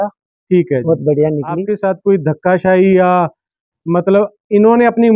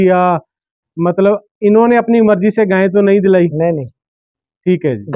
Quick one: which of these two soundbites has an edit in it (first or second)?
first